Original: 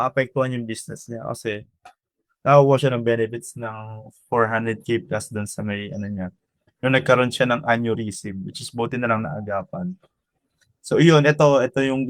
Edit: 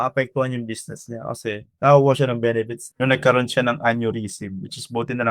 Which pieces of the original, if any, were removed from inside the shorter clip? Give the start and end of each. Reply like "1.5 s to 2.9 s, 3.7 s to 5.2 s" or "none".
1.7 s to 2.3 s, 3.4 s to 6.6 s